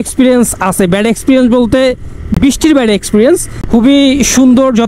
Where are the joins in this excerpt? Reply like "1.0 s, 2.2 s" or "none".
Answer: none